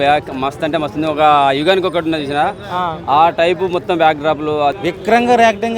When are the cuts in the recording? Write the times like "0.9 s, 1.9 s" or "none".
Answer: 4.8 s

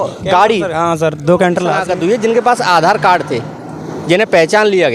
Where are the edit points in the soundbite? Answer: 1.8 s

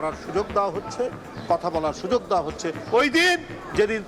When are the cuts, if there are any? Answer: none

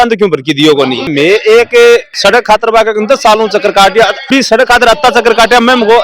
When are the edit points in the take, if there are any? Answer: 1.1 s, 4.2 s

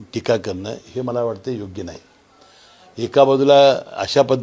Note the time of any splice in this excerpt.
none

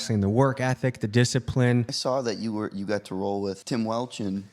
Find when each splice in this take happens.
1.9 s, 3.6 s

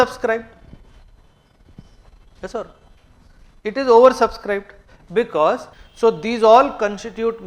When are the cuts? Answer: 5.8 s

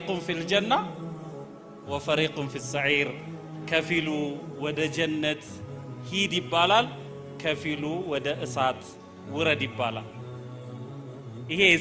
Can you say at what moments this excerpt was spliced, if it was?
none

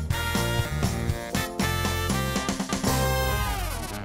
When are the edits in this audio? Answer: none

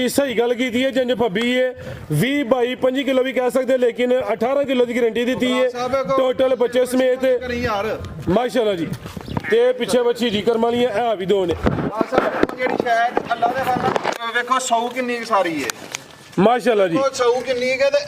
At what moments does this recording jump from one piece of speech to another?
none

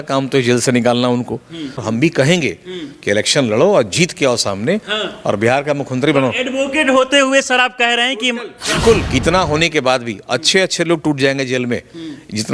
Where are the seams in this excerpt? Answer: 1.8 s, 9.1 s

